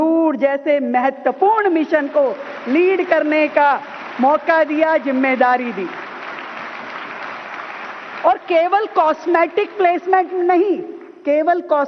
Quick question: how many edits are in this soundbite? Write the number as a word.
one